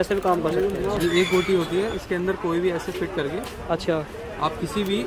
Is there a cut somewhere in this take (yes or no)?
yes